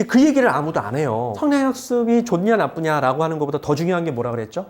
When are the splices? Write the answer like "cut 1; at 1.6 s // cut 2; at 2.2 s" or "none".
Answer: cut 1; at 1.3 s